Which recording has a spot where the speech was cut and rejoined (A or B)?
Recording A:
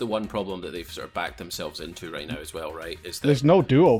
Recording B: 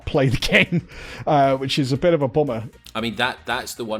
B